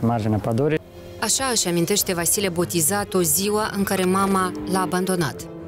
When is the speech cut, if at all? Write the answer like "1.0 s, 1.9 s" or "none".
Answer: 0.9 s